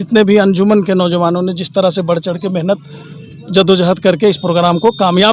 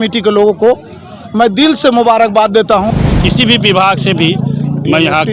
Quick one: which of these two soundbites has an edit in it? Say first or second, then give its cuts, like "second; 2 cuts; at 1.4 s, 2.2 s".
second; 1 cut; at 2.9 s